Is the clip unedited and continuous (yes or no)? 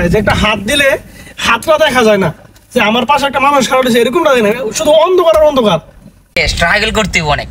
no